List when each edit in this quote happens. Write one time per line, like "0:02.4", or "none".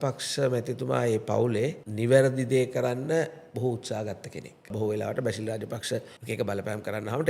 0:01.8
0:04.7
0:06.1